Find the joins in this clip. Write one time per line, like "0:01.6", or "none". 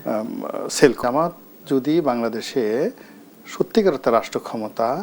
0:01.0